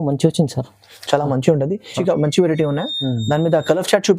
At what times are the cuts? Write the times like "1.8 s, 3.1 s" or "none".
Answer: 2.0 s

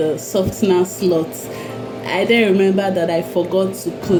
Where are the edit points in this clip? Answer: none

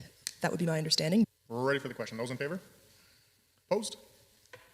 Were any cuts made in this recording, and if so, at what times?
1.3 s

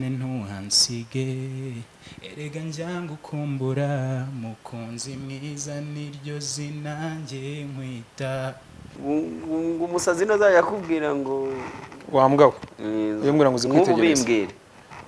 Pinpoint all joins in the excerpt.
8.8 s

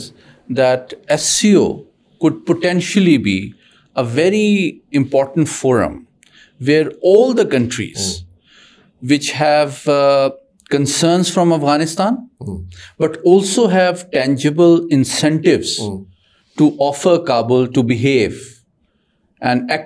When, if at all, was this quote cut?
none

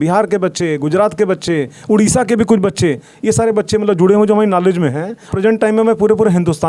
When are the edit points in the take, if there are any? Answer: 5.3 s

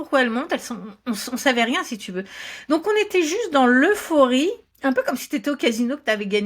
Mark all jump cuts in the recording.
none

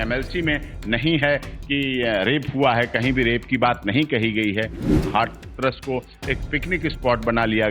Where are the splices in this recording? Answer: 5.0 s

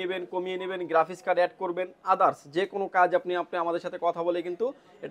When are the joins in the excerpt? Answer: none

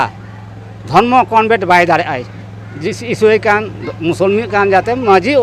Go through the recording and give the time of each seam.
none

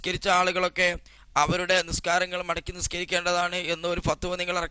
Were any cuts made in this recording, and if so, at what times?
none

